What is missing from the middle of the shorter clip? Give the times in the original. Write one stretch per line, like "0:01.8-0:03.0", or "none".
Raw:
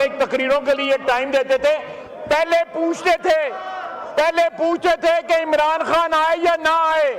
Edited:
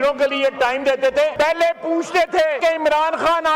0:01.8-0:02.2
0:03.5-0:05.2